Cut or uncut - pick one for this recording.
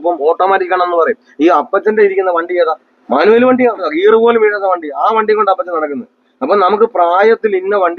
cut